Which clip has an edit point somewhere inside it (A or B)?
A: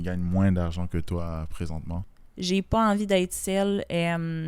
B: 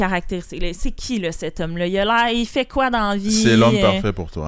A